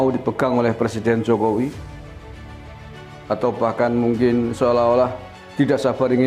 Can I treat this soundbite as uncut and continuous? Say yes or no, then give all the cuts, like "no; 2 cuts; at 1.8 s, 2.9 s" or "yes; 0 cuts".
no; 2 cuts; at 1.8 s, 3.3 s